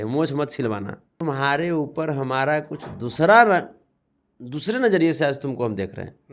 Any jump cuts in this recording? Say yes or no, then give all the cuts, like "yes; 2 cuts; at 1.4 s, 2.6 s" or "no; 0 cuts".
yes; 1 cut; at 1.1 s